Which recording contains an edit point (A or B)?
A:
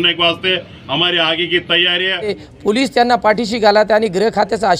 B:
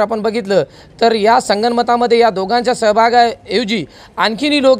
A